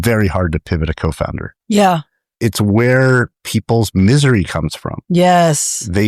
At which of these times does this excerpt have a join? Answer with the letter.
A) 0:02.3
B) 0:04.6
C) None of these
A